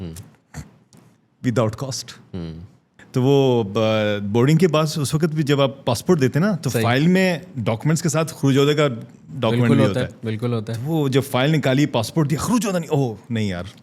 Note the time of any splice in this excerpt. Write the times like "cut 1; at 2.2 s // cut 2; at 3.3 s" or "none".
cut 1; at 2.9 s